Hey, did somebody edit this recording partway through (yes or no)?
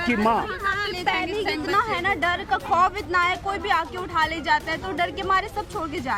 no